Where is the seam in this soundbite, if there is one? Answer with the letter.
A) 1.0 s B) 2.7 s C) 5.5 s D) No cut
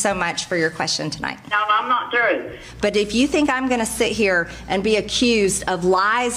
B